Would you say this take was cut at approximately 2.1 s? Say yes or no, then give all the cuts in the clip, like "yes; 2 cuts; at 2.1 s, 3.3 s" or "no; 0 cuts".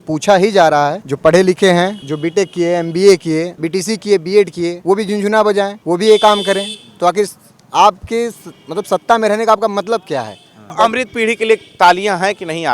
yes; 6 cuts; at 1.1 s, 2.1 s, 3.6 s, 4.8 s, 5.8 s, 10.7 s